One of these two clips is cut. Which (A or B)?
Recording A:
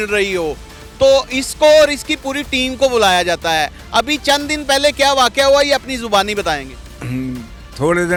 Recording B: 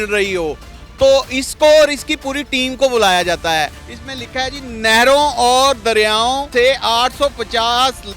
B